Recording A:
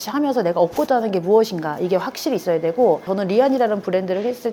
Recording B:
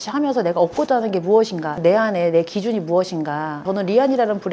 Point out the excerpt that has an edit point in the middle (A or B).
B